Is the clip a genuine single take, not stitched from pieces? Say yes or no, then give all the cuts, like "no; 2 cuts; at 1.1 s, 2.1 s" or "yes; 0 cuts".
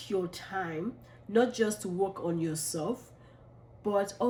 yes; 0 cuts